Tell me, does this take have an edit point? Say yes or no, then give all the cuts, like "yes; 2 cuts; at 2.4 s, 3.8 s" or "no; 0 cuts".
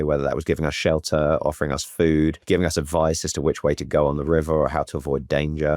yes; 1 cut; at 2.4 s